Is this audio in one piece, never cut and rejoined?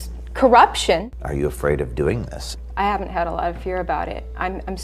no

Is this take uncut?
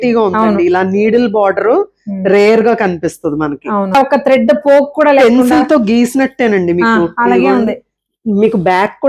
no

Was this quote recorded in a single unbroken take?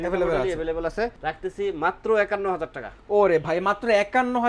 no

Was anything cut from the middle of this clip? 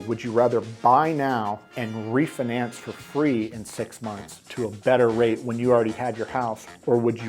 yes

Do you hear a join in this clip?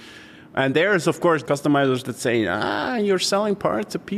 yes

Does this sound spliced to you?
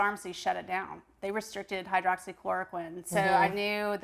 no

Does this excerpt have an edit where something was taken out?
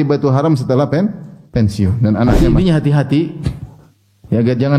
yes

